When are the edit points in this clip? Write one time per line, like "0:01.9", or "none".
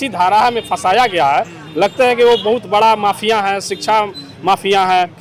none